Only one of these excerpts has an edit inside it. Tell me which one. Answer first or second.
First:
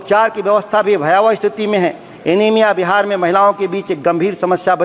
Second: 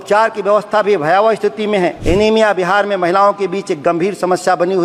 second